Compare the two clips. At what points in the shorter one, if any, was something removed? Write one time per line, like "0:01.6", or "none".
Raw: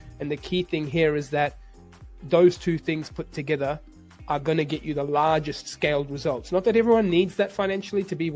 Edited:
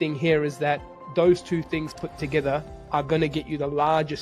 0:00.9
0:02.8

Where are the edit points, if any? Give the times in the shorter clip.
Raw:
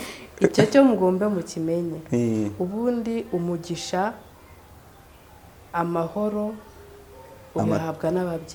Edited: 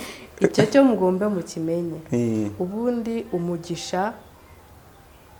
none

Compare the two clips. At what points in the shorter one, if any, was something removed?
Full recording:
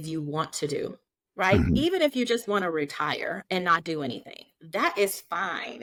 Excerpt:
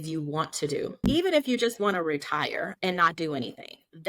0:01.1

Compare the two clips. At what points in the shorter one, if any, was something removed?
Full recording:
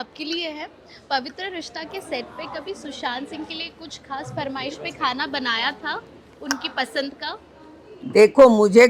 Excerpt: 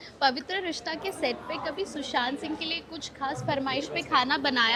none

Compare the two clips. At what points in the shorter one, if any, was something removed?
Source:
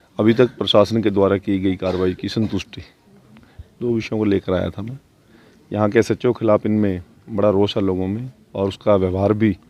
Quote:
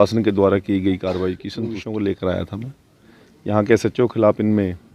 0:01.5

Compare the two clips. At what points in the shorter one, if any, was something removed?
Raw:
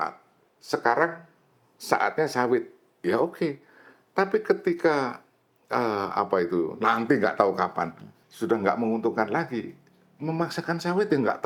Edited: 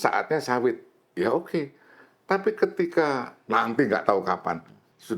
0:03.4

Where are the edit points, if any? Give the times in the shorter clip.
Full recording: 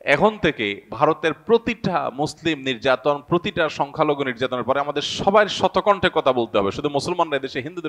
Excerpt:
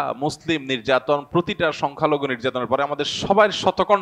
none

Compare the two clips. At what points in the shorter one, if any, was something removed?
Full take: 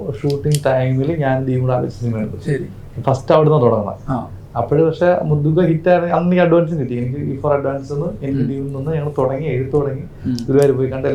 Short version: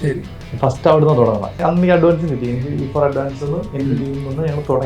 0:01.6

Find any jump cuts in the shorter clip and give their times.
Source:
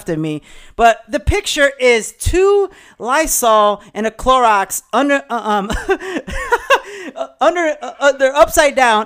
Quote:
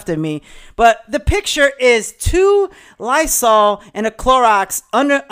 none

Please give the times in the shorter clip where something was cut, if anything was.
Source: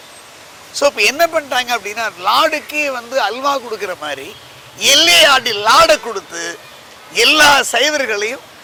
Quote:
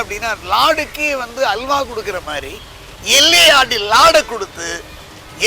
none

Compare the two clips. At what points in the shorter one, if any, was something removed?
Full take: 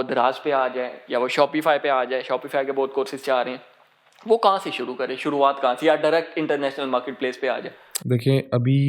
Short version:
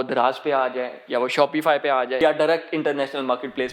0:02.2

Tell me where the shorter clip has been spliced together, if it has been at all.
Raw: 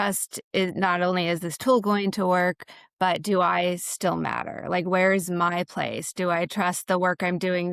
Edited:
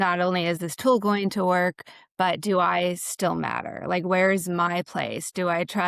none

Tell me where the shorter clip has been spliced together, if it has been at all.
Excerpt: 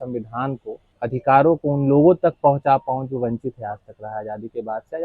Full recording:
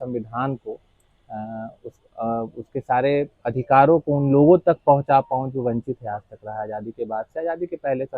0:00.9

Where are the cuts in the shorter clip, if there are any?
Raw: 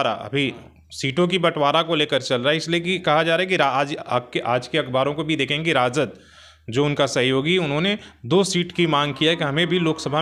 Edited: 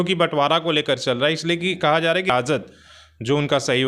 0:02.3

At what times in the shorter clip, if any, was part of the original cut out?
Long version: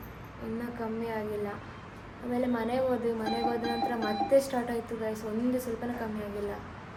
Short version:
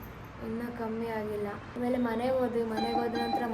0:01.6

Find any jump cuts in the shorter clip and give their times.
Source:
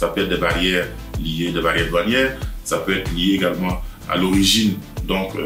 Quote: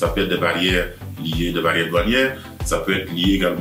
none

